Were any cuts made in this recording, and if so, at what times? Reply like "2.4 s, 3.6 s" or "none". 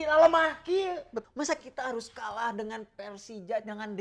1.1 s